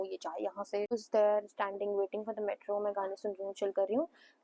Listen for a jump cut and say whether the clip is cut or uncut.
cut